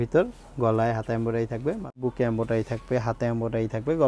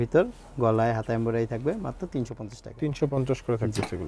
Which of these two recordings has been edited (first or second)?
first